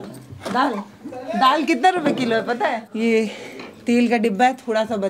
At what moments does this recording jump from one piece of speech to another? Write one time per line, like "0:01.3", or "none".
0:02.9

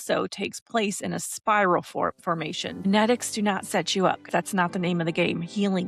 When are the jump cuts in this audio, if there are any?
0:02.9
0:04.2

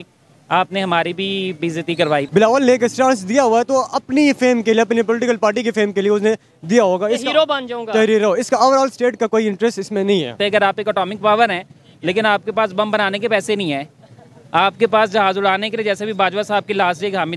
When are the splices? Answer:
0:02.3
0:10.3

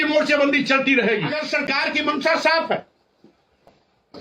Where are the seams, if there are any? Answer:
0:01.4

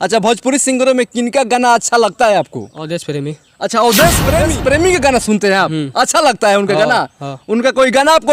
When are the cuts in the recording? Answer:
0:04.4

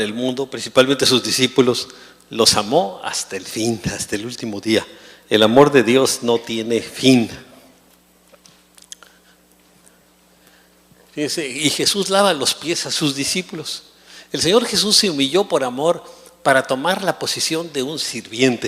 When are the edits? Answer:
0:11.3

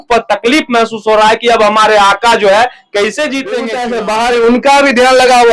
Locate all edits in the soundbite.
0:03.7

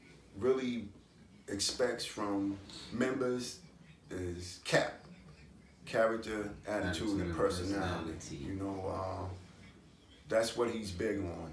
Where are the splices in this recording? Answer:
none

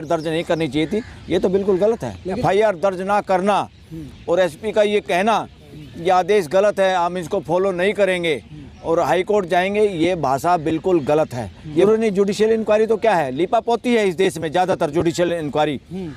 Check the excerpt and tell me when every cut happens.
0:02.4
0:11.8

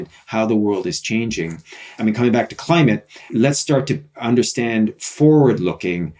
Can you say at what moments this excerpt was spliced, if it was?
0:01.9
0:03.3

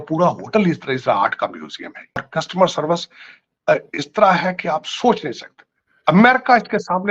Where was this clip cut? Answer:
0:02.3

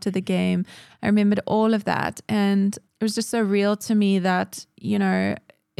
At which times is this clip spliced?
0:02.8

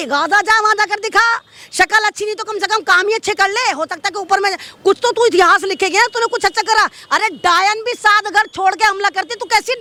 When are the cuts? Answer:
none

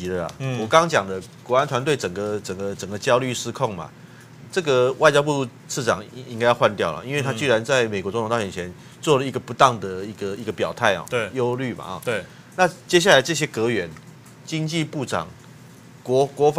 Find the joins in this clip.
none

